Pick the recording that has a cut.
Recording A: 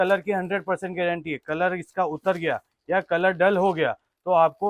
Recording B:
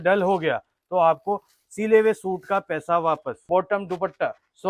B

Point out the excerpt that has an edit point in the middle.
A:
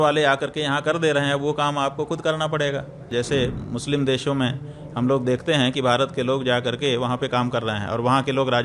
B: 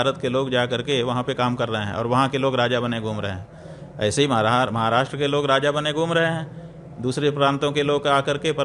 A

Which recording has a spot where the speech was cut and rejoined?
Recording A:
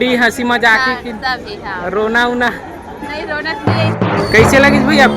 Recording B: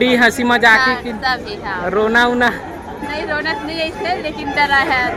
A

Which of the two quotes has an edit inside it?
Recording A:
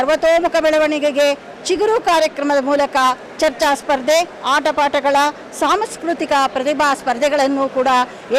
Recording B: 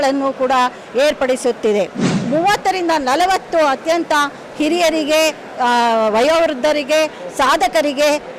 B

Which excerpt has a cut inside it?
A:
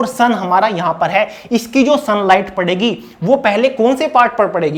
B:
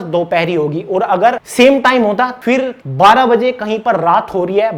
B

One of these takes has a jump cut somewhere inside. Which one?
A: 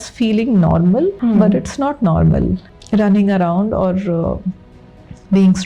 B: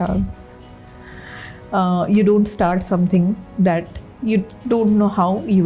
A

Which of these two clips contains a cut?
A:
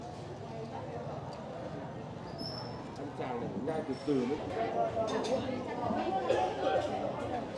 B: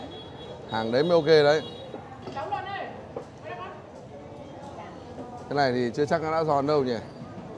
A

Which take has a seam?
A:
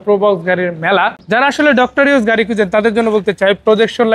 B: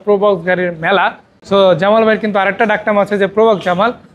A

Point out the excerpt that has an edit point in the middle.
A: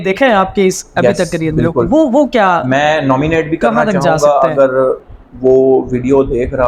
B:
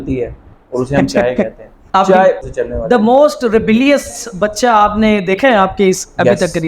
B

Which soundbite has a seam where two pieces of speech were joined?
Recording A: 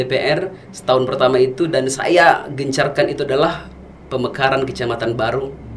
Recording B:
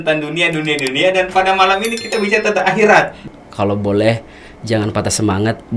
B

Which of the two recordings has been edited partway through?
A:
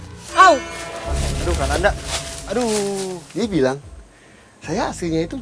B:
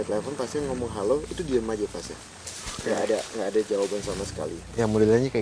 A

